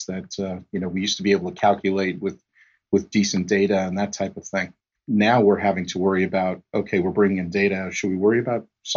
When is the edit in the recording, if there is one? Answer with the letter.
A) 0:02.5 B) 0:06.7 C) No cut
C